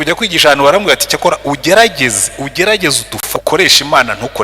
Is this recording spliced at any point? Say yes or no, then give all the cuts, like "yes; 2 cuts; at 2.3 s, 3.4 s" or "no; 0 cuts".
yes; 1 cut; at 3.4 s